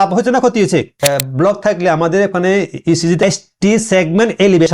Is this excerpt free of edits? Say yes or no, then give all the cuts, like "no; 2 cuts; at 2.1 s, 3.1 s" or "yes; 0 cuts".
no; 2 cuts; at 1.0 s, 3.2 s